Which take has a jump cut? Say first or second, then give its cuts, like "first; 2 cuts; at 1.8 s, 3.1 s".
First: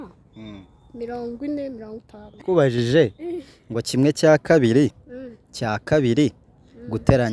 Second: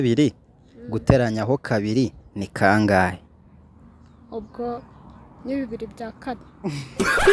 first; 1 cut; at 2.4 s